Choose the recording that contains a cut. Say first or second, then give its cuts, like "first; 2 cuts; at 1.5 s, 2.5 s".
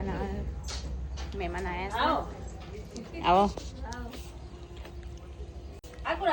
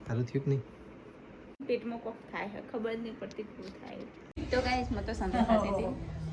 second; 2 cuts; at 1.6 s, 4.2 s